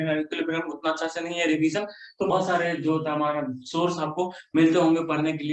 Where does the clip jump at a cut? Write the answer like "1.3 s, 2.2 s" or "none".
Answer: 2.3 s